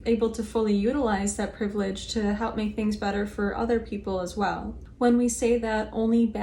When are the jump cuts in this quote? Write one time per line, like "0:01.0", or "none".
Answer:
none